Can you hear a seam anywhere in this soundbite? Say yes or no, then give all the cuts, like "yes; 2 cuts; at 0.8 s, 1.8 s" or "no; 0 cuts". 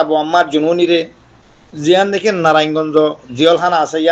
yes; 1 cut; at 0.9 s